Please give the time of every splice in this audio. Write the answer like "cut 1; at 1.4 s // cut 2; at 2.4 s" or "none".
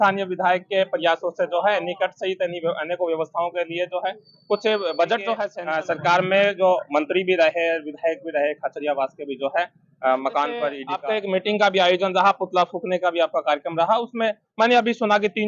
cut 1; at 5.6 s // cut 2; at 10.9 s

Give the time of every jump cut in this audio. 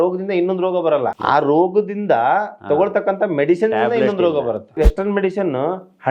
cut 1; at 1.2 s // cut 2; at 4.8 s

